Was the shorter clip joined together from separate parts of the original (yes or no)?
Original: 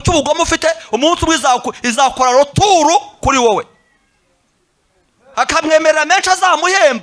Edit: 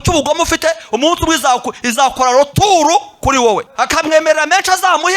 yes